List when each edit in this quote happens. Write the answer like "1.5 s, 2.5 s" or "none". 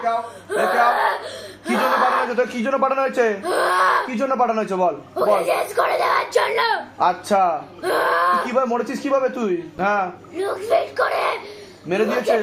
9.8 s